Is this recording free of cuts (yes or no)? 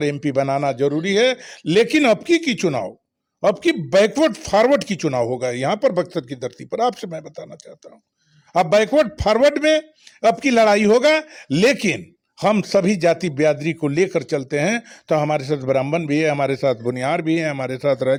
yes